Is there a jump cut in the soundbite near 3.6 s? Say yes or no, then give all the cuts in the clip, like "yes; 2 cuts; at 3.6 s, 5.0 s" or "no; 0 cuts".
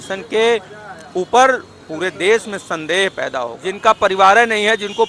yes; 1 cut; at 3.6 s